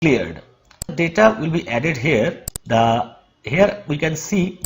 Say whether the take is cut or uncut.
cut